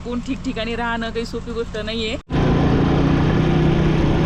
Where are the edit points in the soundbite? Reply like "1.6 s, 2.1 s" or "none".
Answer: 2.3 s